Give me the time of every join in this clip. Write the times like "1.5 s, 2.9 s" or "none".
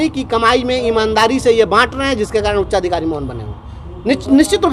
none